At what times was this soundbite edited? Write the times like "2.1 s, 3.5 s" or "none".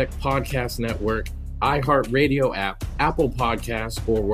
1.2 s